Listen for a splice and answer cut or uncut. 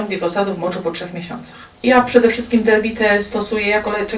cut